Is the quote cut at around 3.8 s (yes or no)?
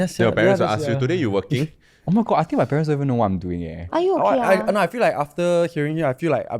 yes